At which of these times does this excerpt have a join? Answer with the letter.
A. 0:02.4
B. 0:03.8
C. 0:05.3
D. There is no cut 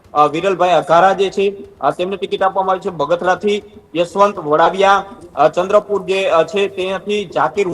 D